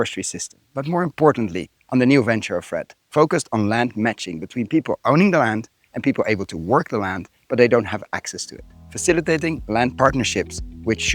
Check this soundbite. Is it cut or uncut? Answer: cut